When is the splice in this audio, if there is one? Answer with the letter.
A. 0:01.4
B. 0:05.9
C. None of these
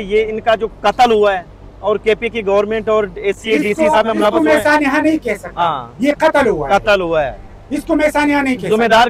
C